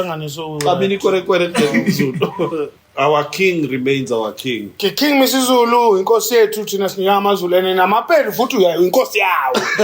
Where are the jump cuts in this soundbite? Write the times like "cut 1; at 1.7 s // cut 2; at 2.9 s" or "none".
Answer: cut 1; at 2.8 s